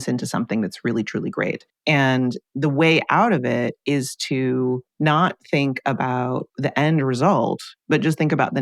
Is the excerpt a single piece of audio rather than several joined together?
no; 4 cuts; at 1.7 s, 4.9 s, 6.5 s, 7.7 s

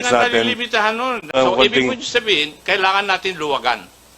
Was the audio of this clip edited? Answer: yes; 1 cut; at 1.3 s

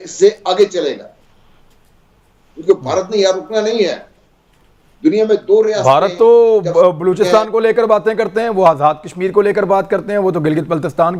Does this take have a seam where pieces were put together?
no; 0 cuts

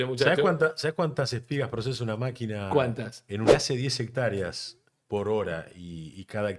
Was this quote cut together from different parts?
yes; 1 cut; at 3.5 s

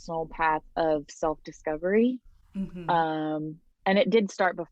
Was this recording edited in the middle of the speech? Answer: no; 0 cuts

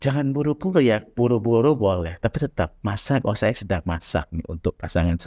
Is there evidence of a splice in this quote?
no; 0 cuts

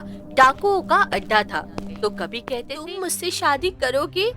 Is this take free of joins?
no; 1 cut; at 2.8 s

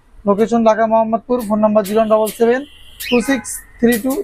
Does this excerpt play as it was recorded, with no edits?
yes; 0 cuts

